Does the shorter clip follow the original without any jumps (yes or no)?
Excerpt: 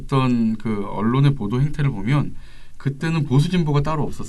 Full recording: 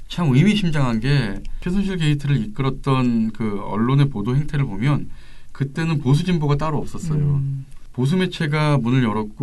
yes